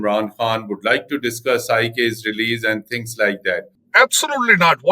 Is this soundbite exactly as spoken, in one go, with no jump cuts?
no; 1 cut; at 3.8 s

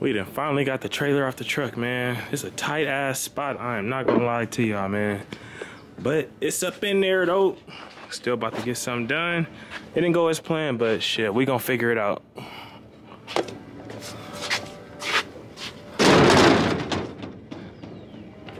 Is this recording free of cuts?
yes; 0 cuts

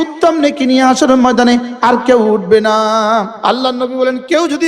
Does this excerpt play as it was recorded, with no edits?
no; 1 cut; at 3.3 s

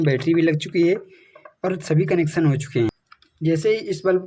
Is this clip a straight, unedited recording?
no; 1 cut; at 3.0 s

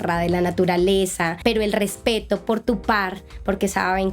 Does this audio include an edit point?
yes; 1 cut; at 1.3 s

